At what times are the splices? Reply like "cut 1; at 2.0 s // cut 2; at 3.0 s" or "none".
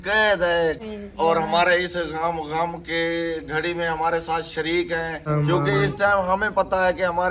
cut 1; at 0.9 s // cut 2; at 5.3 s